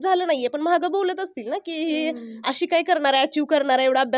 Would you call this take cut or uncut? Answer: uncut